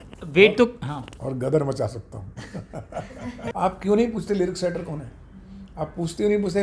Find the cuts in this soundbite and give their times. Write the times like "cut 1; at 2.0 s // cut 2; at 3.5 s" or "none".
cut 1; at 3.5 s